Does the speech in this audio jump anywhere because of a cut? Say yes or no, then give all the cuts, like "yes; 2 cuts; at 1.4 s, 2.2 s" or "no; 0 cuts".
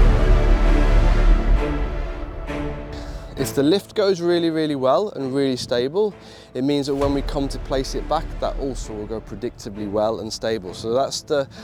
no; 0 cuts